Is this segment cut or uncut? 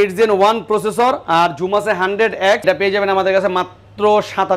cut